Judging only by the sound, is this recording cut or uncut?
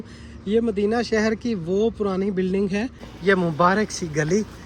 cut